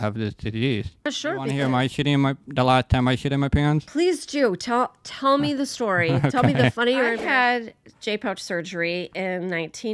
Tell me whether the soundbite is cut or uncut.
cut